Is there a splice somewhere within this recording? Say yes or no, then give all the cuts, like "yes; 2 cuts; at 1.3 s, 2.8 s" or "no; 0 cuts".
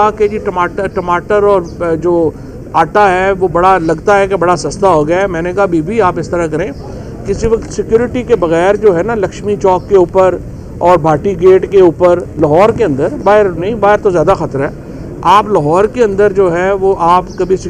no; 0 cuts